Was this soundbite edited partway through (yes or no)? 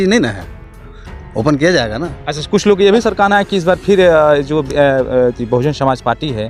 no